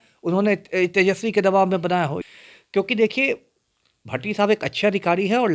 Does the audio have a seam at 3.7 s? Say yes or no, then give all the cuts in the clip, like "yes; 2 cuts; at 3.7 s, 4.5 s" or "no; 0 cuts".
no; 1 cut; at 2.1 s